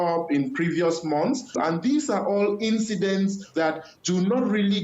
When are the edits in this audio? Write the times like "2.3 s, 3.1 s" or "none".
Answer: 3.5 s